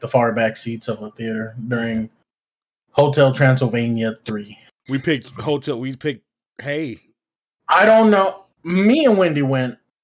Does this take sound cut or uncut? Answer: cut